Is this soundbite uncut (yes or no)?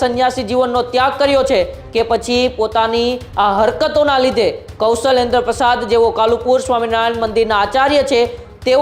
yes